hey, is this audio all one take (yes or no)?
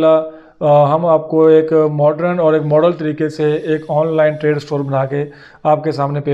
yes